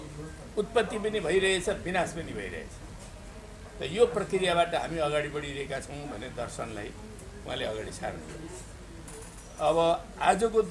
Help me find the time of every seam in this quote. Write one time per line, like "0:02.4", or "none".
0:09.0